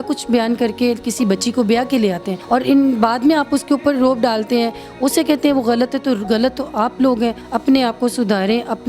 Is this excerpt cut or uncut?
cut